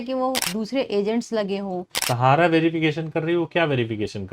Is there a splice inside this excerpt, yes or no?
yes